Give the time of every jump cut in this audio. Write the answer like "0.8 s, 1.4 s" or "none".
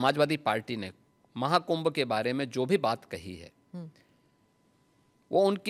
none